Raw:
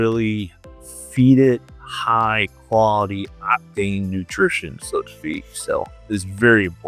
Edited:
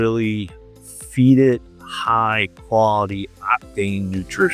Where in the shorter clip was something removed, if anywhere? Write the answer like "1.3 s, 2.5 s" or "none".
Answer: none